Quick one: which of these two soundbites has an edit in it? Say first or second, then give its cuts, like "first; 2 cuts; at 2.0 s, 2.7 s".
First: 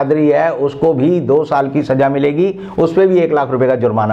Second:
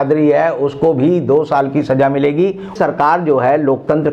second; 1 cut; at 2.7 s